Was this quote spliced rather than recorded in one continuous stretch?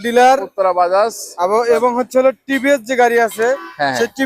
no; 0 cuts

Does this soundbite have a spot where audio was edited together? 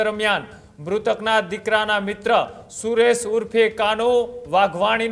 no; 0 cuts

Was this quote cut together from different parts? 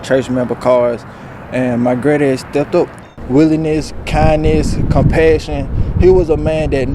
yes; 1 cut; at 3.1 s

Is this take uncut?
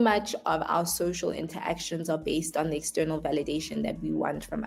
yes; 0 cuts

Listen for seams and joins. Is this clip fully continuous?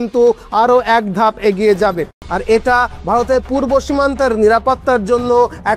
no; 1 cut; at 2.1 s

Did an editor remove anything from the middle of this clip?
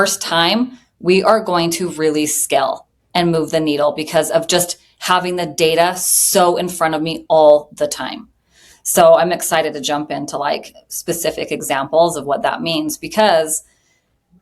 no; 0 cuts

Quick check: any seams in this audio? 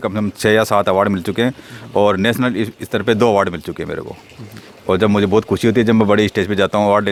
no; 0 cuts

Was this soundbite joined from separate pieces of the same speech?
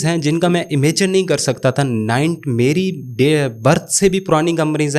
no; 0 cuts

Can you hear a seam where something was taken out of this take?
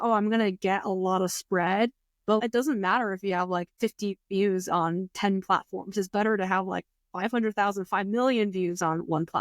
yes; 2 cuts; at 2.4 s, 3.7 s

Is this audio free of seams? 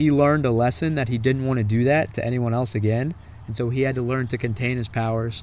yes; 0 cuts

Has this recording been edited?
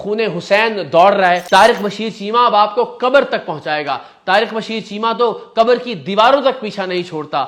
yes; 1 cut; at 1.4 s

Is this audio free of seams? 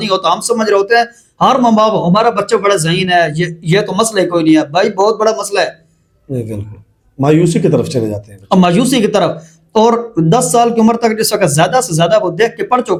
yes; 0 cuts

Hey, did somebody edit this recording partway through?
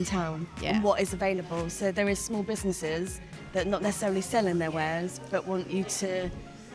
no; 0 cuts

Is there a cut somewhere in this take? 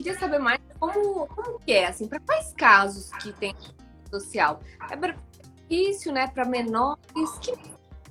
no; 0 cuts

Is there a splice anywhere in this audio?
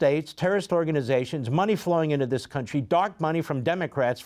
no; 0 cuts

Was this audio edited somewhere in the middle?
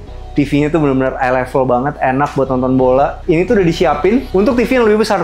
yes; 2 cuts; at 3.2 s, 4.3 s

